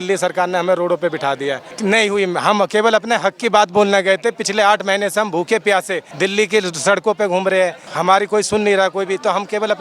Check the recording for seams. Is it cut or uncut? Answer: cut